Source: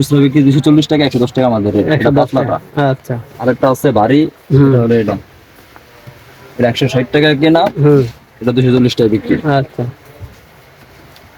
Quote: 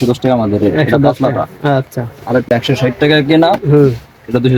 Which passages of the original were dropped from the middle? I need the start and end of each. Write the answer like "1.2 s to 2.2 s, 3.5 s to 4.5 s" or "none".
3.6 s to 6.6 s